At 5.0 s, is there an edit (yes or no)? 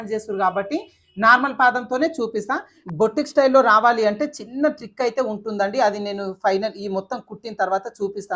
no